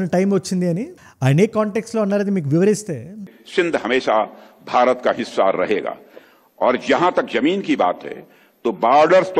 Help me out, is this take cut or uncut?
uncut